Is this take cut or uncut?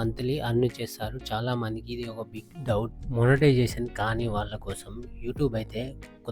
cut